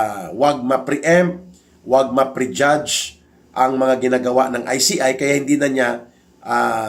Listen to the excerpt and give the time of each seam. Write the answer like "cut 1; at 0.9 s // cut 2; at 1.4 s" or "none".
none